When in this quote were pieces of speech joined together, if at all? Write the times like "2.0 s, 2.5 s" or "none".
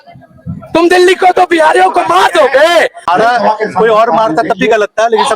3.0 s